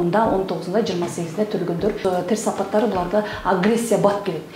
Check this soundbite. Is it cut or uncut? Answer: cut